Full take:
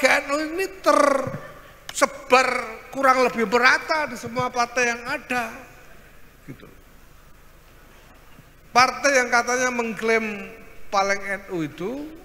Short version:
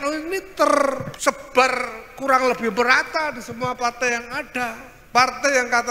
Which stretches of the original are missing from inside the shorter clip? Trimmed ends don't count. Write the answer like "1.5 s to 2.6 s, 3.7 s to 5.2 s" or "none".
1.4 s to 1.8 s, 5.7 s to 8.5 s